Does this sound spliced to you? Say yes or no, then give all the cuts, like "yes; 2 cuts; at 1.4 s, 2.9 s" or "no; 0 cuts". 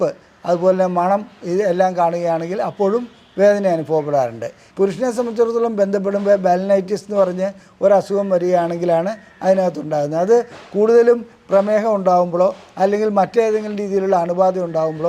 yes; 1 cut; at 4.6 s